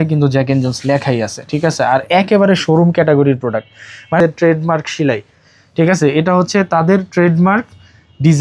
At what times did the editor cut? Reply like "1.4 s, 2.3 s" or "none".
4.2 s